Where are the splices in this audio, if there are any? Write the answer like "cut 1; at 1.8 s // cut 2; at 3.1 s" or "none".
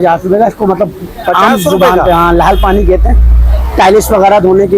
none